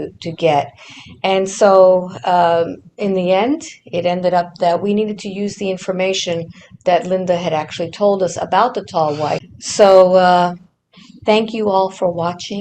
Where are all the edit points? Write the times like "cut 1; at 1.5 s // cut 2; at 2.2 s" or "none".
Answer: cut 1; at 9.4 s